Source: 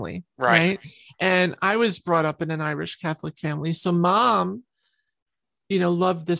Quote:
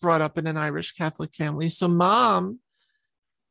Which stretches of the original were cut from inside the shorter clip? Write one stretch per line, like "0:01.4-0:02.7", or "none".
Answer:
none